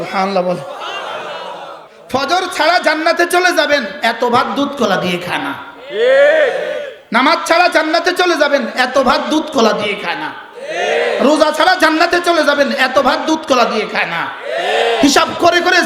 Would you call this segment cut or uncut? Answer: cut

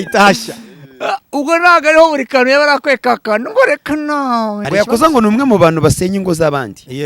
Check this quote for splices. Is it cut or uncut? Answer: cut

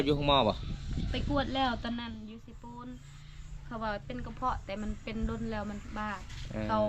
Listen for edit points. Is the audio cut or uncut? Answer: uncut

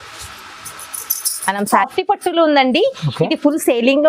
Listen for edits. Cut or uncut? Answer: cut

